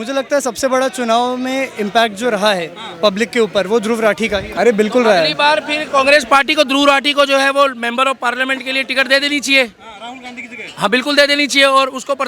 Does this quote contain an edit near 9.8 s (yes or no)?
no